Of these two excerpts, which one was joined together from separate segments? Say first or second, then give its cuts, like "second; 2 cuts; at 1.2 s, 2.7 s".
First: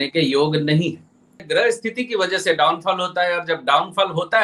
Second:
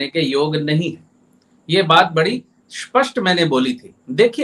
first; 1 cut; at 1.4 s